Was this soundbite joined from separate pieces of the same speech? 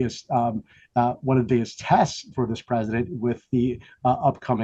no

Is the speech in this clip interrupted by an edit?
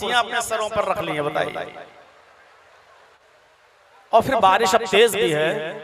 yes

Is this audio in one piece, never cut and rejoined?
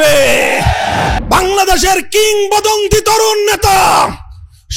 no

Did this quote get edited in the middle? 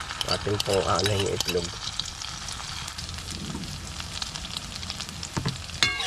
yes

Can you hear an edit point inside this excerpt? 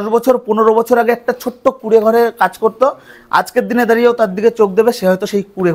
no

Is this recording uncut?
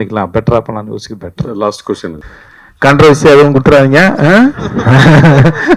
no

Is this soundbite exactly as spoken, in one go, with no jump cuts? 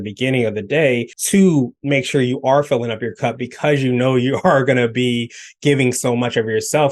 no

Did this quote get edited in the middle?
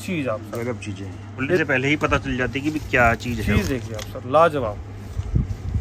yes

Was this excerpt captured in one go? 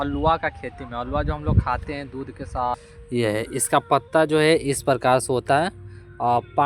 no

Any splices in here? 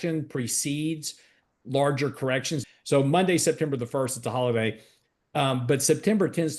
yes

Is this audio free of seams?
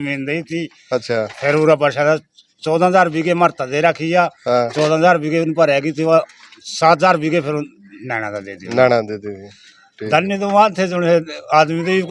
yes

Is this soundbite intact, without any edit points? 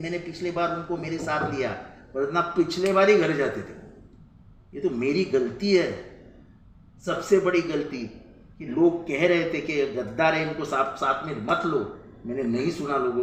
yes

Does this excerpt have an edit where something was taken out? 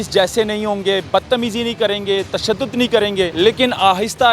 yes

